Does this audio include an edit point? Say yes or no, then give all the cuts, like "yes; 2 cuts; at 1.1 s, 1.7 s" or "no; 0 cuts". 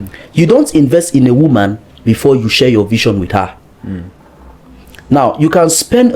no; 0 cuts